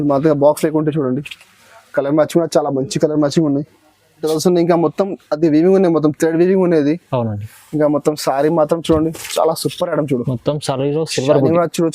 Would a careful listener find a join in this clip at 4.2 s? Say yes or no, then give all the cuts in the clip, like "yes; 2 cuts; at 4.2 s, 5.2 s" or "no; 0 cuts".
yes; 1 cut; at 4.2 s